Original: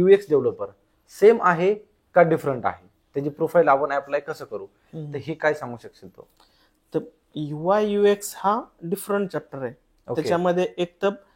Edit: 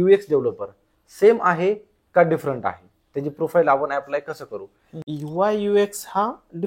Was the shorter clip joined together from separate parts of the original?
yes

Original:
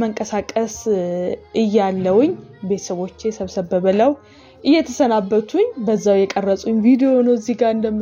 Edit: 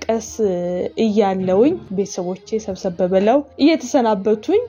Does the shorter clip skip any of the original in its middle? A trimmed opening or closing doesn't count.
yes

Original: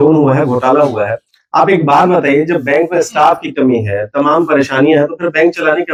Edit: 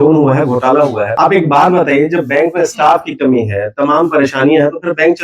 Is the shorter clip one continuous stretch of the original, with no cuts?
no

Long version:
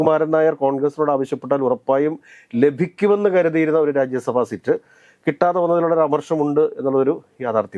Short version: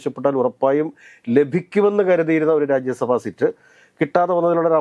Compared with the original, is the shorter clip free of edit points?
yes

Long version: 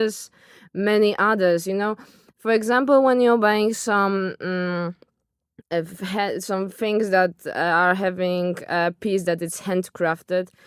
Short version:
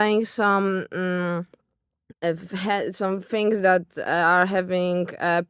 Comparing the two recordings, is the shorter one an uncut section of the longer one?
yes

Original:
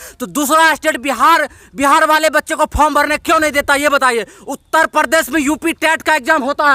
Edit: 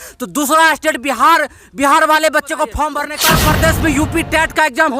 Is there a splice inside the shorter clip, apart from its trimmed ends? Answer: yes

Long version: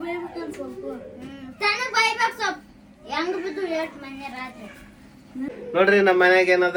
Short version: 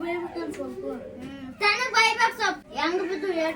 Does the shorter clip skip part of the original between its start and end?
yes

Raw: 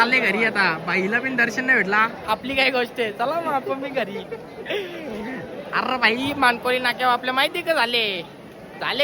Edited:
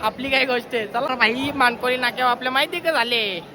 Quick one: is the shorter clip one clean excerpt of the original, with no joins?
no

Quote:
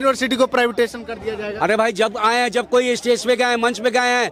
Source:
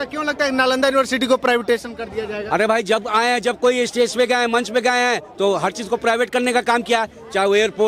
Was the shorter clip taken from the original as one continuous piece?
yes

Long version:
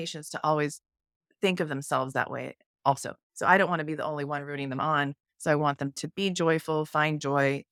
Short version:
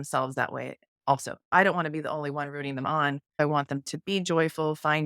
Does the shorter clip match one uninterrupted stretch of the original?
no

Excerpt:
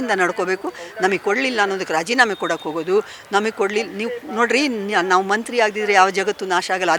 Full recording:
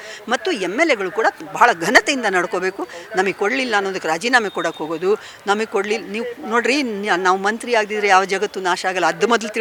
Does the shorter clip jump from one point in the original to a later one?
no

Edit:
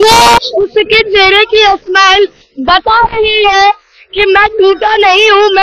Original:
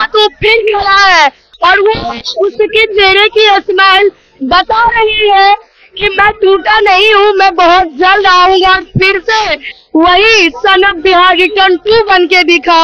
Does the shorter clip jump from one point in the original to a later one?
no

